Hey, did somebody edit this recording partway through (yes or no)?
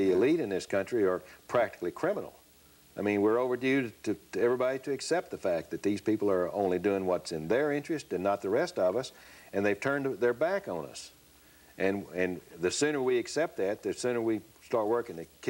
no